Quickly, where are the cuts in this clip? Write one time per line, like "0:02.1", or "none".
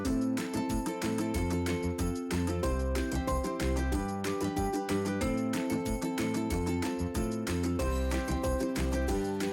none